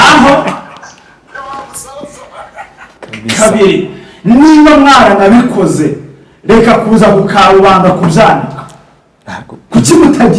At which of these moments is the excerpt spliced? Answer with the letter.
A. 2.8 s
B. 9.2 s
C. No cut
A